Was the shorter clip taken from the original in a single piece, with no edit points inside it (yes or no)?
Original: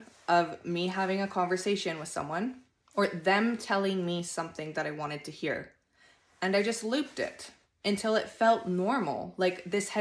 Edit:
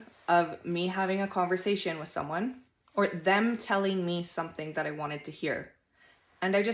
yes